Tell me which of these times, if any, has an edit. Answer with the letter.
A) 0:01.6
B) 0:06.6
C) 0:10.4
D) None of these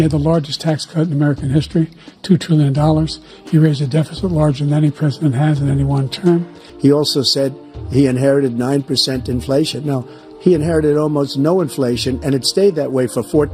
B